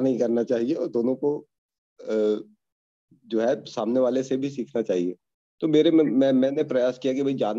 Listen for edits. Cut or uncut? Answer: uncut